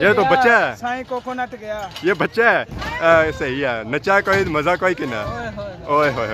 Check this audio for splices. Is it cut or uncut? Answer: cut